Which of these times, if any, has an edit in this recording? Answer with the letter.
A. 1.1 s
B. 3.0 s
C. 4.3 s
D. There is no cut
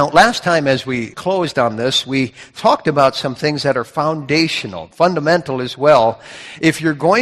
A